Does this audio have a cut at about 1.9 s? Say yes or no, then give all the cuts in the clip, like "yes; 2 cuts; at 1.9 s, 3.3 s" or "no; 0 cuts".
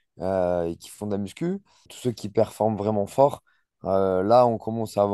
yes; 1 cut; at 1.9 s